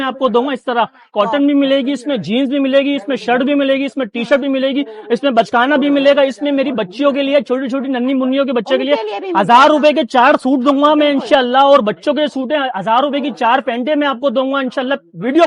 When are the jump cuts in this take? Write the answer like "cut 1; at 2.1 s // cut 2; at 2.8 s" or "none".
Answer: none

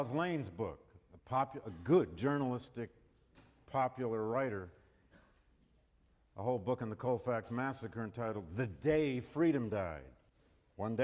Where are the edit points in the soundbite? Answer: cut 1; at 9.9 s

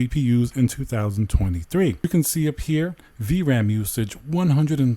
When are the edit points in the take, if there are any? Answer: cut 1; at 2.0 s

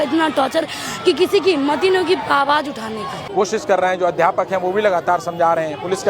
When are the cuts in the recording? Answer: cut 1; at 3.2 s

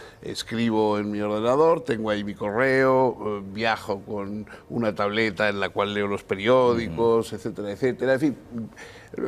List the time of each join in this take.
cut 1; at 8.2 s

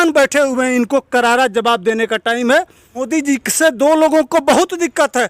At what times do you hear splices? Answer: cut 1; at 3.1 s

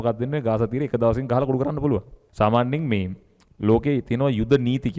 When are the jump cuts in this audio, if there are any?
cut 1; at 2.2 s

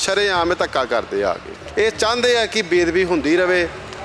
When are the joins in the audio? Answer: cut 1; at 1.5 s

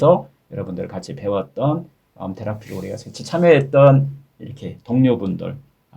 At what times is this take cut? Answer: cut 1; at 2.0 s

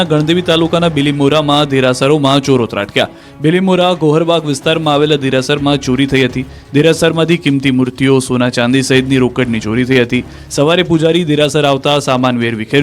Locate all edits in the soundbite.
cut 1; at 11.7 s

